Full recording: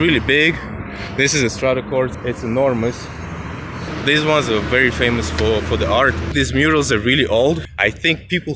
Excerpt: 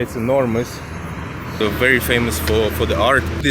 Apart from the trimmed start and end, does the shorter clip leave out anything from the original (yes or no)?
yes